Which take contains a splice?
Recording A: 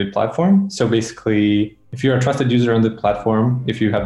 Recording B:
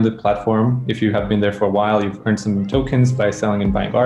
A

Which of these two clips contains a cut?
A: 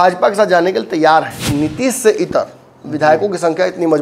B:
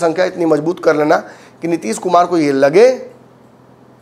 A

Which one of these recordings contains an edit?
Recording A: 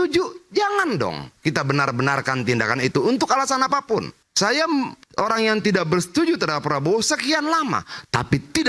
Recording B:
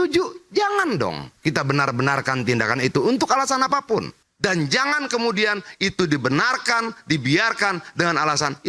B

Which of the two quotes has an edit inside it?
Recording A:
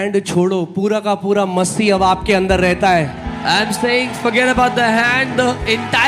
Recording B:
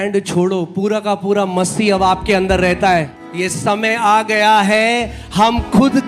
B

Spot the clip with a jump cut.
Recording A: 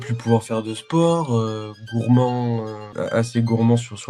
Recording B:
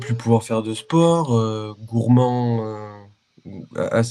A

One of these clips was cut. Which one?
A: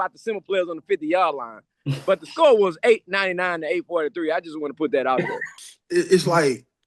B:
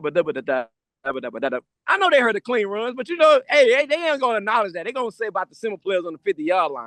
A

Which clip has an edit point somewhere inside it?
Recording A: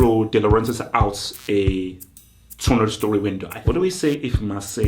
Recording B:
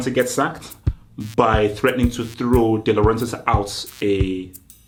A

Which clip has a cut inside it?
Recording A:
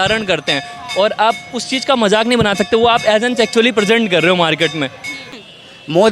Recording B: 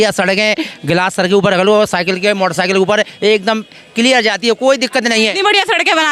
A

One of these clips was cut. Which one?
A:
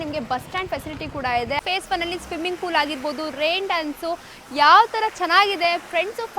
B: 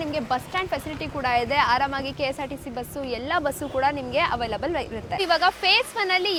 A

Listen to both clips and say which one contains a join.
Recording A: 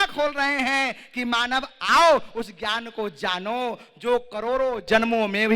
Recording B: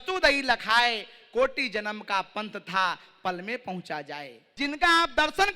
B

